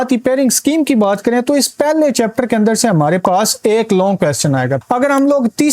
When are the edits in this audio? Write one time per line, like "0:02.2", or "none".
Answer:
0:04.8